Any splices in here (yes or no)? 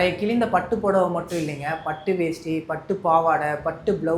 no